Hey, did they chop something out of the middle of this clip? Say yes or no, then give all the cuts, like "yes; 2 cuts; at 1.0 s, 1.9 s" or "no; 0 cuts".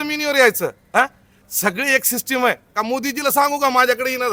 no; 0 cuts